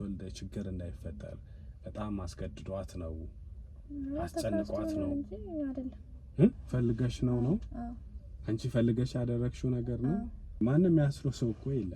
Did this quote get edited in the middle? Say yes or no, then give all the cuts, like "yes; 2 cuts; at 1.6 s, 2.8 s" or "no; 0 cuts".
yes; 2 cuts; at 6.6 s, 10.6 s